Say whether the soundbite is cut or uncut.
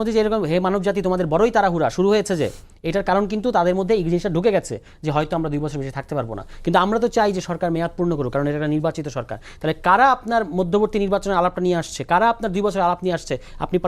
uncut